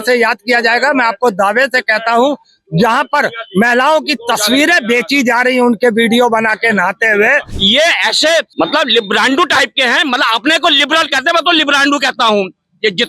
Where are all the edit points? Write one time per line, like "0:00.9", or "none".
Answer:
0:07.5
0:08.5